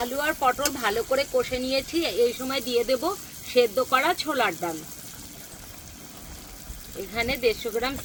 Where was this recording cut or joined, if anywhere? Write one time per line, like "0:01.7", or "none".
none